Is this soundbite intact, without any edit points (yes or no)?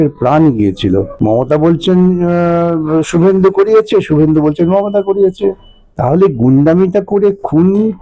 no